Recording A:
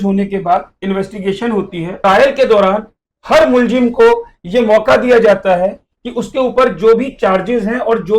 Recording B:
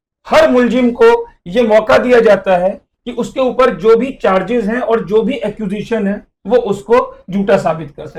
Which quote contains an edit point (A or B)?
A